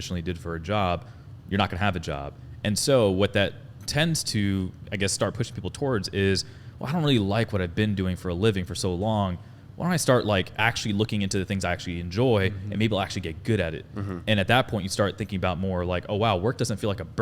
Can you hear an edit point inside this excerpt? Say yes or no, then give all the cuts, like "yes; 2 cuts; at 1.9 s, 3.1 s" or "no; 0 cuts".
no; 0 cuts